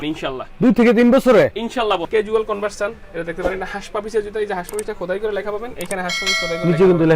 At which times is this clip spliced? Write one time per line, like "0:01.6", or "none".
0:02.1